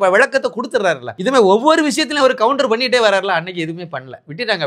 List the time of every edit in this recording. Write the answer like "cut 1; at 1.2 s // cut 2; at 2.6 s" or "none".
cut 1; at 1.1 s

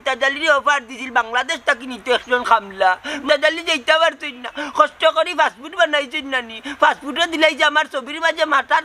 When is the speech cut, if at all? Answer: cut 1; at 3.2 s

